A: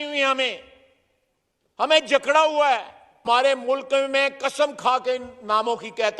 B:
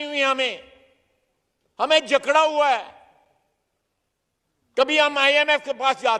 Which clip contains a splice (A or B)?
A